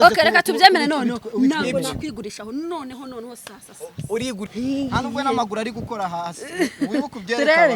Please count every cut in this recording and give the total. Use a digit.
1